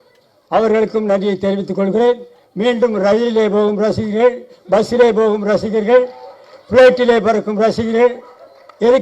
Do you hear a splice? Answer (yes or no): no